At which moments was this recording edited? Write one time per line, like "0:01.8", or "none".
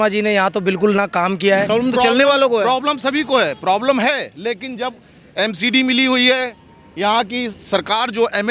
0:01.7